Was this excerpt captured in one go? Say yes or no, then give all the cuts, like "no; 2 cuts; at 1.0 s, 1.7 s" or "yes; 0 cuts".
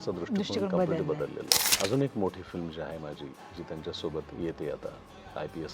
no; 1 cut; at 1.5 s